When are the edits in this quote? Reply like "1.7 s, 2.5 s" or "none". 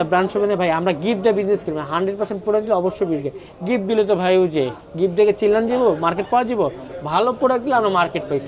none